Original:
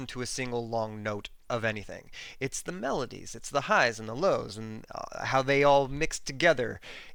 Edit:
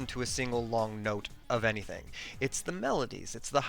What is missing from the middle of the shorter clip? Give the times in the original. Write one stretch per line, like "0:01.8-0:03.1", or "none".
none